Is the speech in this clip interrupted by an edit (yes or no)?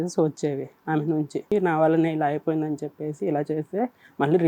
yes